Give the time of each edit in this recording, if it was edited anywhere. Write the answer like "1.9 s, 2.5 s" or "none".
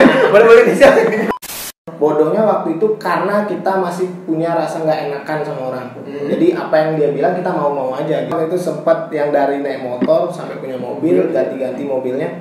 1.3 s, 8.3 s